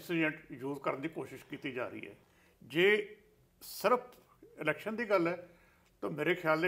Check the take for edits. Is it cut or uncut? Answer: cut